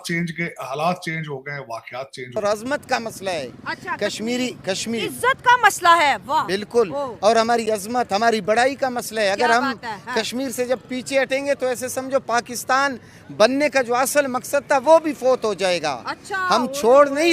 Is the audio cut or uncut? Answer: cut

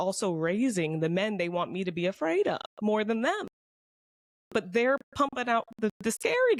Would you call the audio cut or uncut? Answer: uncut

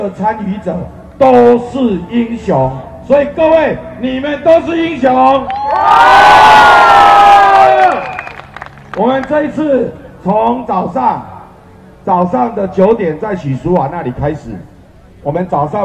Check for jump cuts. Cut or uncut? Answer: uncut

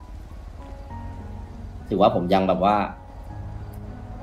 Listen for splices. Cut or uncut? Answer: uncut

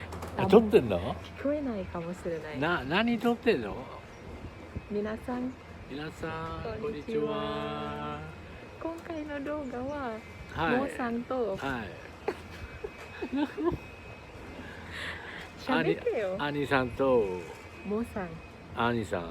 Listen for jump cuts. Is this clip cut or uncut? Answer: cut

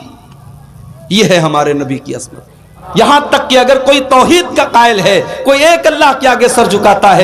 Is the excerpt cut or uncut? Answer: cut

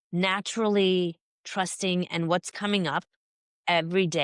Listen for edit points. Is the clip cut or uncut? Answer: uncut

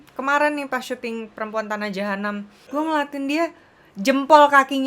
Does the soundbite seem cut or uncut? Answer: cut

